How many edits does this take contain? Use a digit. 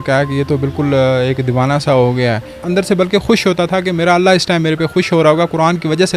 1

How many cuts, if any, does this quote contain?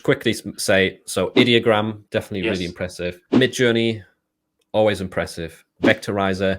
2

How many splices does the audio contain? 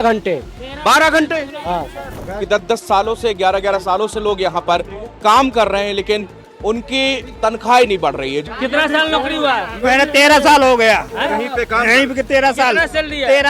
2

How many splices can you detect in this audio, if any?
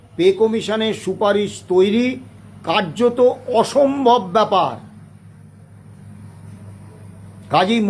0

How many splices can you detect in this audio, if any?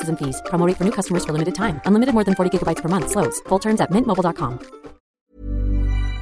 1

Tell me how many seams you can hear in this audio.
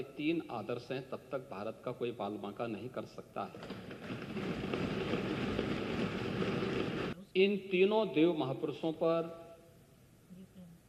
1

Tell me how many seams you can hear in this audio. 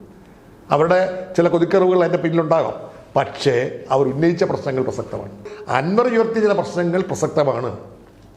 1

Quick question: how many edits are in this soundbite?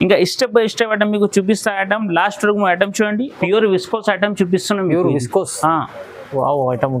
1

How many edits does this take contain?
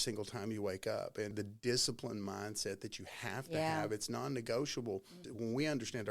2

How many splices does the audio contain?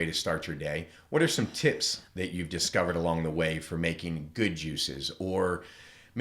1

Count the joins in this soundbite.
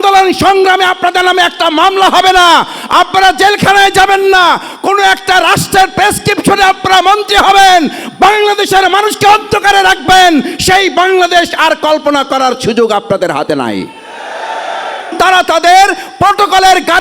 1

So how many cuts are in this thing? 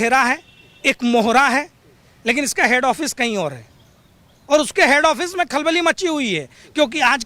0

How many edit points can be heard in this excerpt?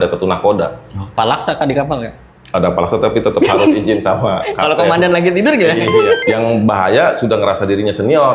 2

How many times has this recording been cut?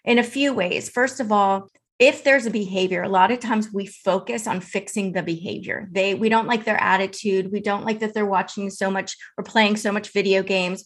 1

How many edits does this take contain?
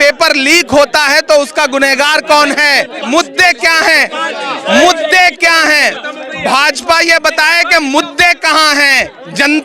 1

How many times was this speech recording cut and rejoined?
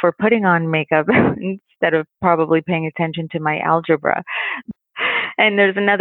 1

